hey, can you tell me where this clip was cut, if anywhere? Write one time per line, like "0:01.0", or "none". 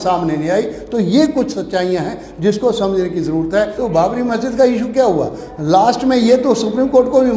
0:03.7